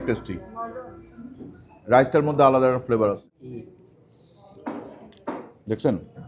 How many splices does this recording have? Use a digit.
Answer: 1